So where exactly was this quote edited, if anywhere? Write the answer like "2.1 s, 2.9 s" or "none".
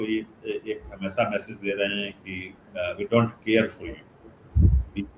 none